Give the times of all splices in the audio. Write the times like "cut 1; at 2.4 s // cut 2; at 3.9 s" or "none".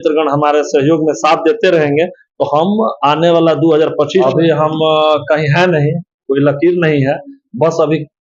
cut 1; at 4.2 s